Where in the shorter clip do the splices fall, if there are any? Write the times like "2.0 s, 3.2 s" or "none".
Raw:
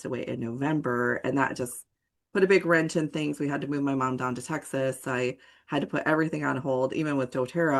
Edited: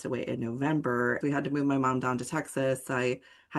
1.2 s